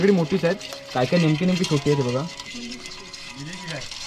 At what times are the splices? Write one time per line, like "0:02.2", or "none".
0:02.4